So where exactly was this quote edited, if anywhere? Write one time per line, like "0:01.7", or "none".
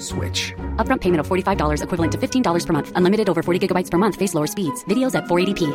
none